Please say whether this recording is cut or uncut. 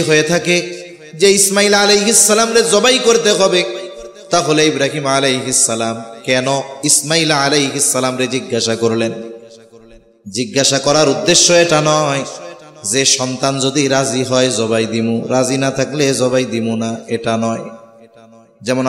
uncut